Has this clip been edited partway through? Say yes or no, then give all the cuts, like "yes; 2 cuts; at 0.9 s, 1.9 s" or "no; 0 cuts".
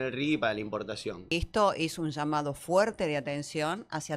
yes; 1 cut; at 1.3 s